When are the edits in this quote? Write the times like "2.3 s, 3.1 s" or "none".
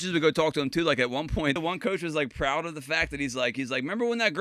1.6 s